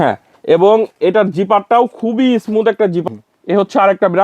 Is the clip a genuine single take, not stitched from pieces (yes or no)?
no